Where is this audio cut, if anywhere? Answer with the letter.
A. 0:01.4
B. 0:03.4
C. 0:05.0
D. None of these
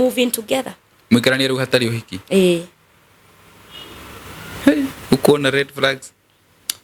D